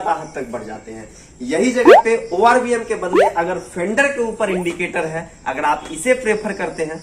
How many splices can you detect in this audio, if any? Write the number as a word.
zero